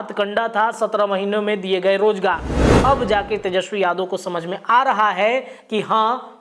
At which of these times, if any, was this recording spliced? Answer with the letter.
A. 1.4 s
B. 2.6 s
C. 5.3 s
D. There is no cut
B